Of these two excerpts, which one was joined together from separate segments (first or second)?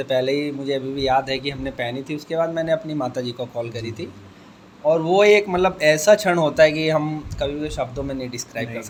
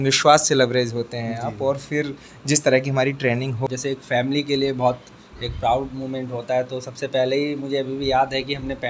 second